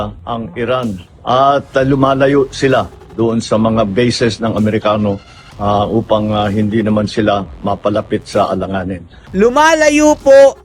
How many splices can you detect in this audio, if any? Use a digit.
2